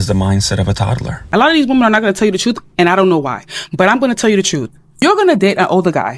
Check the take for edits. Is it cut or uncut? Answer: cut